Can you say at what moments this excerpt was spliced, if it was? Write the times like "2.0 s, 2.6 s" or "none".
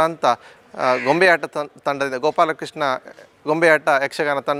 none